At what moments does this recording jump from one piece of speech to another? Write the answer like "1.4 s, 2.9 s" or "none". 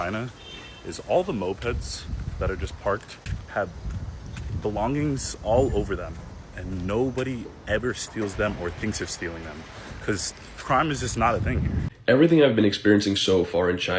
11.8 s